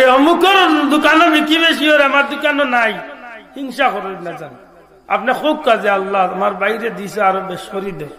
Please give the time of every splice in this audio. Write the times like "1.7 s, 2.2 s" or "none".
none